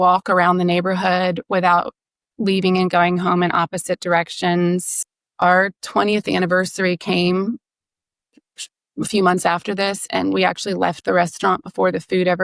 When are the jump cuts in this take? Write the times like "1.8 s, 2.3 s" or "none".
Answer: 5.0 s